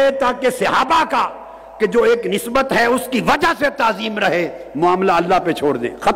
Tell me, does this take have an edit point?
no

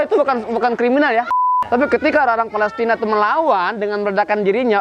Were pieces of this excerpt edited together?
yes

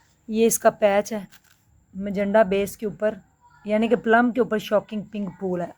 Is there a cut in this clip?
no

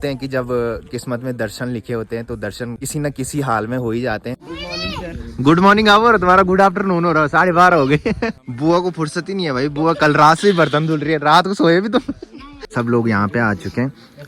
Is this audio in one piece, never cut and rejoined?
no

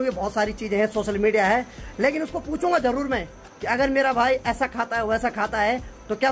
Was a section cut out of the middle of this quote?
no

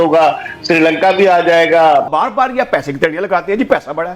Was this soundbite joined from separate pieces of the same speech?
yes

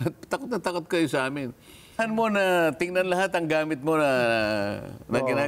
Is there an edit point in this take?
yes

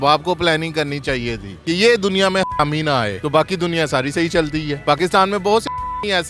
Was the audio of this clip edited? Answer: no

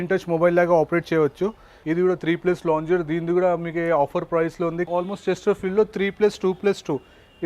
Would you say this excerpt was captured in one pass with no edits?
no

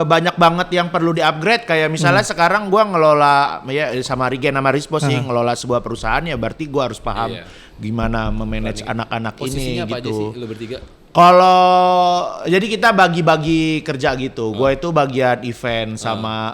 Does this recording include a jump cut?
no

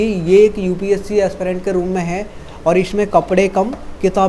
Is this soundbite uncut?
yes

